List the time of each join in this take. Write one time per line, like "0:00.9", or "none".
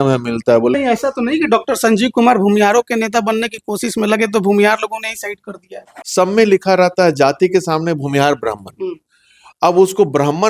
0:00.7
0:05.7